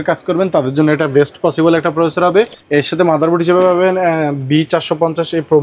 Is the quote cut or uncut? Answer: cut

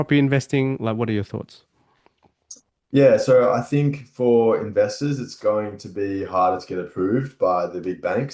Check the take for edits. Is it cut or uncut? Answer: uncut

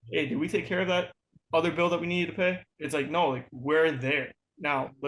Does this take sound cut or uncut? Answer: cut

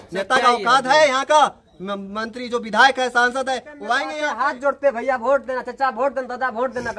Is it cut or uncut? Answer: cut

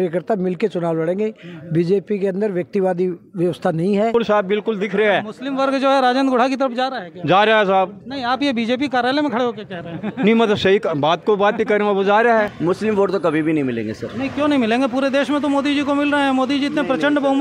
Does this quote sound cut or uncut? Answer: cut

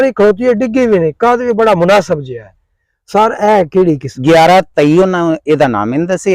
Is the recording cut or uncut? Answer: cut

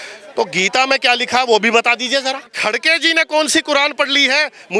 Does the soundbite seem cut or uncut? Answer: cut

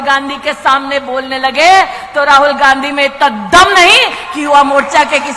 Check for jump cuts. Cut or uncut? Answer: uncut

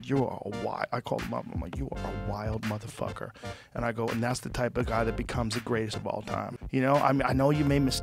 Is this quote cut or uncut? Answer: cut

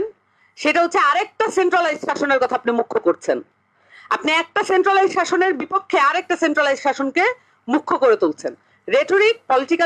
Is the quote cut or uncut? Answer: uncut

